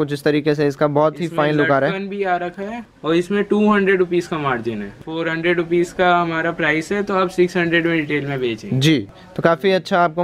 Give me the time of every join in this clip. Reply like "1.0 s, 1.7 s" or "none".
none